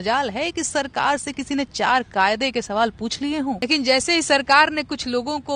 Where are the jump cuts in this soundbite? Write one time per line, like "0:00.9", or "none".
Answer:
0:03.6